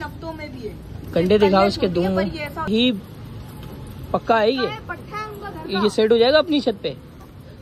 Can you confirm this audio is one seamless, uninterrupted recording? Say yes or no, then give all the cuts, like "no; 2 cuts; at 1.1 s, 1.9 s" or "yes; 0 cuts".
no; 1 cut; at 2.7 s